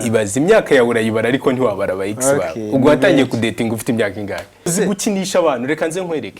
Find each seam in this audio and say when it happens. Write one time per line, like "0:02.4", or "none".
0:04.7